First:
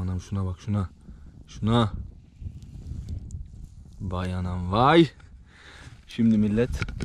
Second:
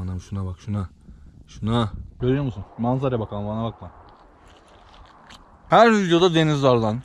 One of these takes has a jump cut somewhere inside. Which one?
second; 2 cuts; at 2.0 s, 5.7 s

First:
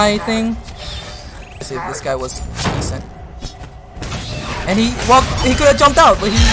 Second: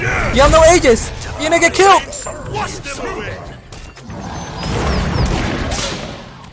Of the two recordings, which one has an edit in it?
first; 1 cut; at 1.7 s

